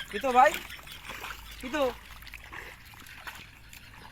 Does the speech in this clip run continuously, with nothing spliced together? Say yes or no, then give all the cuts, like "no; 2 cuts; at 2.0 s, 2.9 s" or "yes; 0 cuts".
yes; 0 cuts